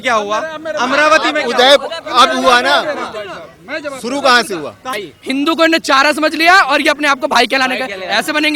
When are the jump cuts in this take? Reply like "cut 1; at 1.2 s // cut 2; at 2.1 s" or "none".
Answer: cut 1; at 5.0 s